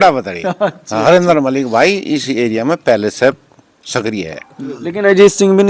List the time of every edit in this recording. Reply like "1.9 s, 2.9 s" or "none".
4.6 s